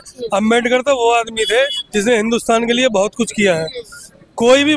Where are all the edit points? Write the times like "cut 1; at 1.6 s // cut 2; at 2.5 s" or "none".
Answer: none